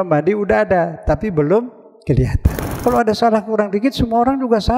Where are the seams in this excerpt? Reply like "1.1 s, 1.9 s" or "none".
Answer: 2.8 s